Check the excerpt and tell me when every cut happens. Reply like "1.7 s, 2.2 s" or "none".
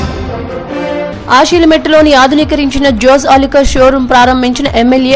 1.1 s